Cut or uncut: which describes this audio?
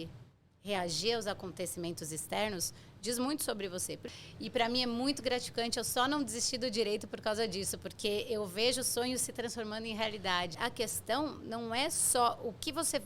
cut